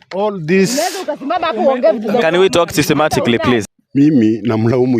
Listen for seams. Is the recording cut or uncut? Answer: cut